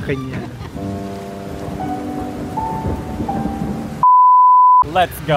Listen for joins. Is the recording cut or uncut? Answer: uncut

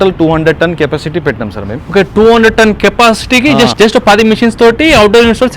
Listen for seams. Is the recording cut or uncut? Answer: uncut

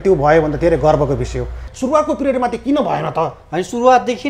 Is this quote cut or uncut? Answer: cut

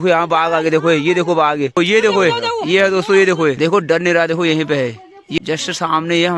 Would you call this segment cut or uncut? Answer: cut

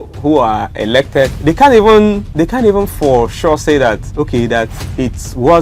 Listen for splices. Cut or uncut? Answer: cut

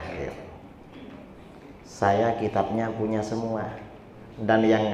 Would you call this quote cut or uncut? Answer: uncut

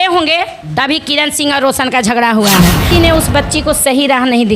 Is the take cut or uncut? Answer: cut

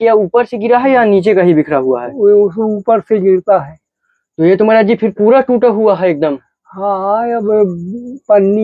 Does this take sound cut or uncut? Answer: uncut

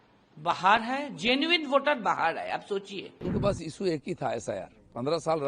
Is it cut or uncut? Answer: cut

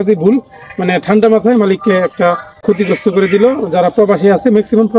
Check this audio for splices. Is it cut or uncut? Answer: cut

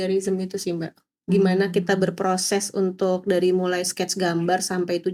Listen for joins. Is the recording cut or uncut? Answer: uncut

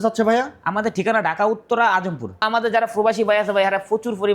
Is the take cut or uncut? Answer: cut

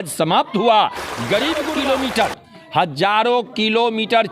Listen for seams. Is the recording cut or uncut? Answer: cut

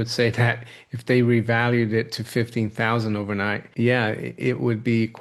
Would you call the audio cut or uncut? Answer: uncut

